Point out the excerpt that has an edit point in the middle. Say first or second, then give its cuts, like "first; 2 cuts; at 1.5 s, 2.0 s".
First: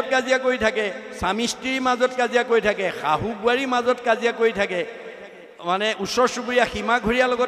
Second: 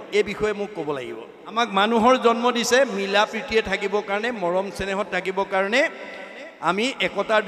second; 1 cut; at 1.5 s